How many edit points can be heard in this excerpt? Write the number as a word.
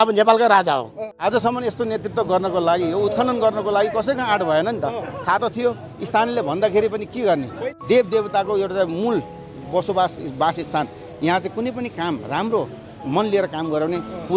two